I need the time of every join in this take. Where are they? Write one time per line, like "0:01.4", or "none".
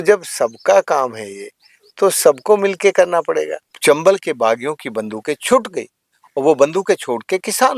0:03.7